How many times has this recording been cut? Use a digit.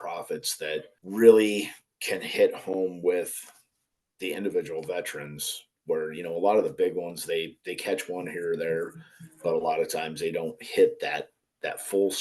1